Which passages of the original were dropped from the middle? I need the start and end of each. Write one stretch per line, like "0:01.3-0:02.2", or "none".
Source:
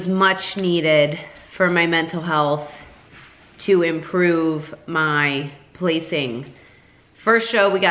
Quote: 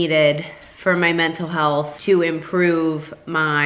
0:02.7-0:03.5